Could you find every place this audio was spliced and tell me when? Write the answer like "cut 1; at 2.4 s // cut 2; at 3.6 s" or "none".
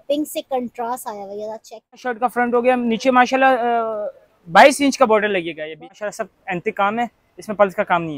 cut 1; at 2.2 s // cut 2; at 5.8 s